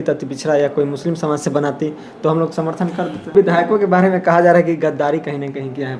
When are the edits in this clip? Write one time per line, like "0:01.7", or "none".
0:03.3